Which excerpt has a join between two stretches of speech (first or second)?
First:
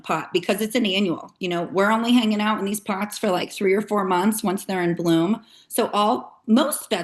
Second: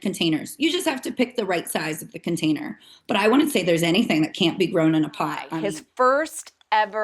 second